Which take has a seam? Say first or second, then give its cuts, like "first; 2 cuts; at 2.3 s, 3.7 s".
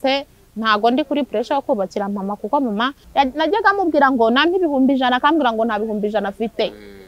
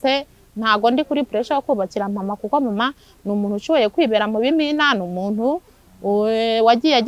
first; 1 cut; at 3.0 s